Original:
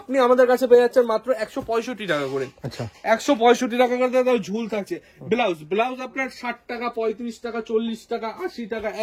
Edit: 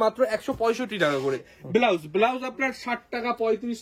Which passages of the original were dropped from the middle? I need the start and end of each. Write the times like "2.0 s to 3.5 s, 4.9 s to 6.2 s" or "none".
2.6 s to 5.1 s